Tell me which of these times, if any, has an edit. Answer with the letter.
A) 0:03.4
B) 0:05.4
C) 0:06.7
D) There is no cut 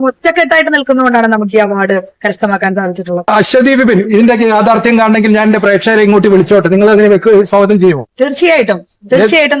A